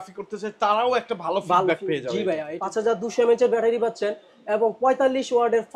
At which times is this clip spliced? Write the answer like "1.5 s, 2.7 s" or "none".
2.5 s